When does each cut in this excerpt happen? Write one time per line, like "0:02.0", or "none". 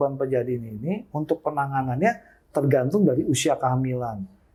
none